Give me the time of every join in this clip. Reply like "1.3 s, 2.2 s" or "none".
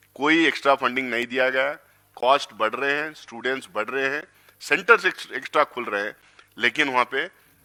none